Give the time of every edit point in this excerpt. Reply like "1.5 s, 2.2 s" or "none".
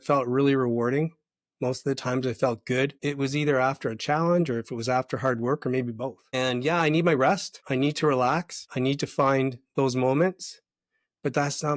3.0 s, 6.2 s, 7.5 s, 8.6 s